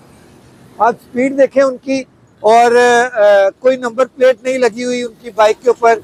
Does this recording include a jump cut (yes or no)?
no